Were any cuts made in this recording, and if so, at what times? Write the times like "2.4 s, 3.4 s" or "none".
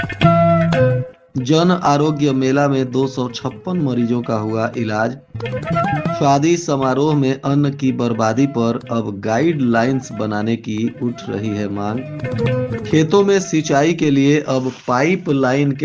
1.1 s